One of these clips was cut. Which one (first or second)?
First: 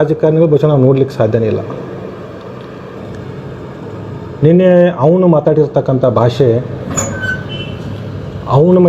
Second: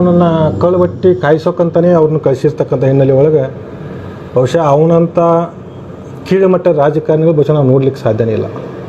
first